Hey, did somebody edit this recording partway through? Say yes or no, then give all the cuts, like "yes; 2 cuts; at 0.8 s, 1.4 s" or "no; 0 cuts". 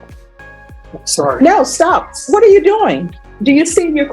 yes; 1 cut; at 0.9 s